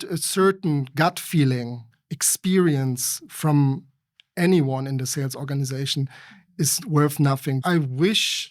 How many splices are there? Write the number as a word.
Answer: one